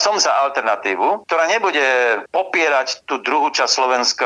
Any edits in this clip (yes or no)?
yes